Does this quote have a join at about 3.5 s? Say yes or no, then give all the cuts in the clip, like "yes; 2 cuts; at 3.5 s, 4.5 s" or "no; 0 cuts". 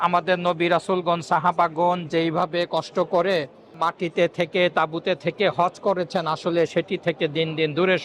no; 0 cuts